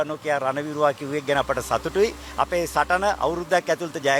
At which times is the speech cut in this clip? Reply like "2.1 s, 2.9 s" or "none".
none